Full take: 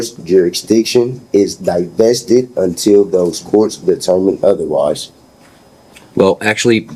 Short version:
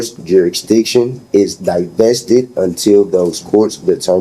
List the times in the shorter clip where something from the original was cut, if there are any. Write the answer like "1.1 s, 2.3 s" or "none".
none